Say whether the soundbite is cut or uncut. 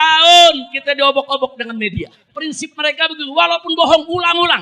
cut